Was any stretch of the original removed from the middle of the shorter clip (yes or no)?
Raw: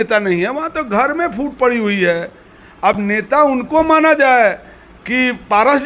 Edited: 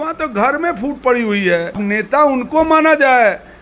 yes